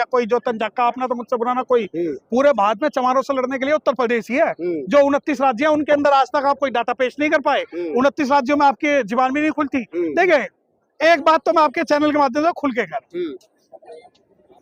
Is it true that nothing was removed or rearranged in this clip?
yes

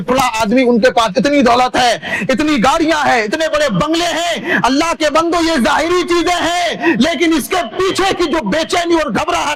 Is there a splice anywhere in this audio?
no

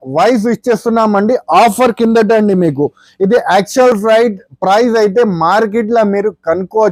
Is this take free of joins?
yes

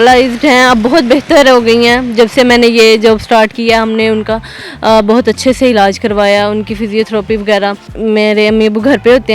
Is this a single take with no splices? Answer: no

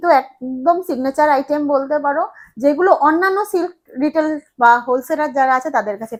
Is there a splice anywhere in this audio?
no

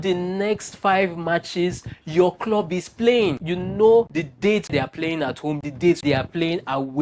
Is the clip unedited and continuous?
yes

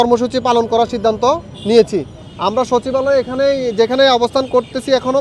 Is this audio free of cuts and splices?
no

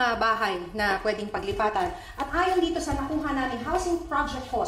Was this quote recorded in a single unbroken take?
no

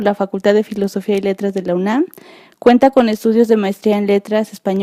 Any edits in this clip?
yes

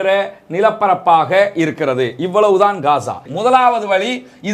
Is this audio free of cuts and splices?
no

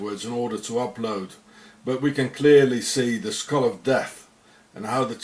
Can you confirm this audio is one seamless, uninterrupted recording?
yes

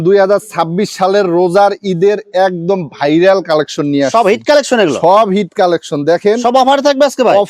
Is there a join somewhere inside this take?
no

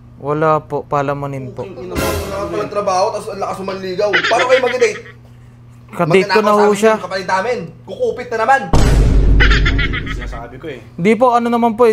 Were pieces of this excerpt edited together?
no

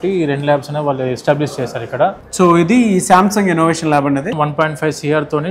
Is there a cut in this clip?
yes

